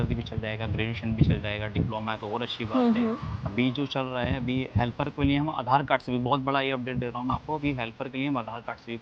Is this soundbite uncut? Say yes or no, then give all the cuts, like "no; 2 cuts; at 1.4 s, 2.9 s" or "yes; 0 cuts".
yes; 0 cuts